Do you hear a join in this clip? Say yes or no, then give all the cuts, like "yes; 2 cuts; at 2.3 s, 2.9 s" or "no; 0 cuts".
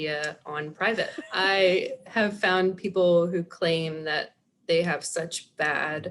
yes; 1 cut; at 1.2 s